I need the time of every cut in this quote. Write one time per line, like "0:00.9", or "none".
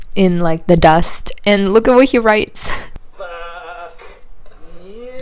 0:03.0